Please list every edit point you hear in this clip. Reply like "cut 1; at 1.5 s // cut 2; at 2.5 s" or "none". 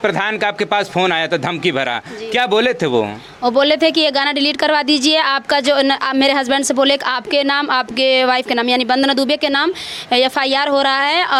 none